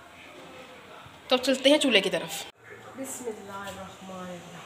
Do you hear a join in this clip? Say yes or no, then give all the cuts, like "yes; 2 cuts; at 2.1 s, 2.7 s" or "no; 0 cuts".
no; 0 cuts